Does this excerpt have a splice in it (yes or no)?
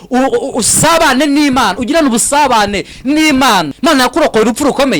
yes